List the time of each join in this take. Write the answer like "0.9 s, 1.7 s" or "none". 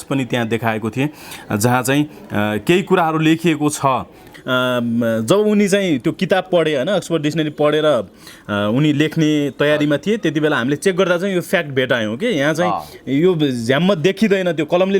4.2 s